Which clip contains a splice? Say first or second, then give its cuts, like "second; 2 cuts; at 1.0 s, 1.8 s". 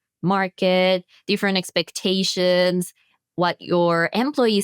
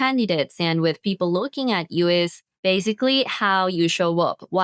second; 1 cut; at 2.4 s